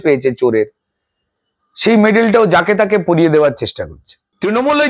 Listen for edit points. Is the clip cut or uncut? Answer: uncut